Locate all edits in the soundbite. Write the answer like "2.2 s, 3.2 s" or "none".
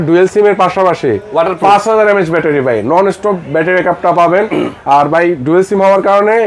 none